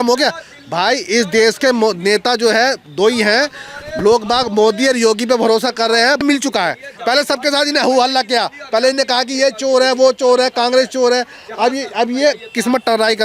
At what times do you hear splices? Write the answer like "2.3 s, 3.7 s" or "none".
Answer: 6.2 s